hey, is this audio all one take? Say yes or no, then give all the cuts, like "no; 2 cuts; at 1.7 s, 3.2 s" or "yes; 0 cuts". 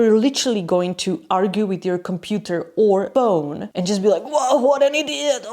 no; 1 cut; at 3.3 s